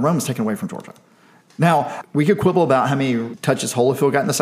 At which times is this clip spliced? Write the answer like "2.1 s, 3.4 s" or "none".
2.0 s, 3.3 s